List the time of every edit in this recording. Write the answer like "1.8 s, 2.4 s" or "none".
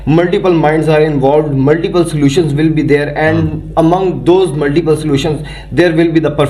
none

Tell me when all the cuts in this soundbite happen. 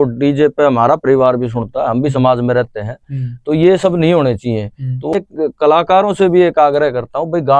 5.1 s

